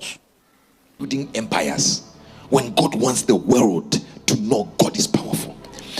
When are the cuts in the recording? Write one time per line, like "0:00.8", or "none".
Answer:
0:01.0